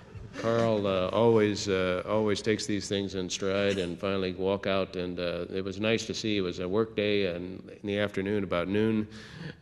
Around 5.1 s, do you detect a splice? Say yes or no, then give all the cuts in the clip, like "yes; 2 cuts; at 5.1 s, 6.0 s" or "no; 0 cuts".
no; 1 cut; at 2.6 s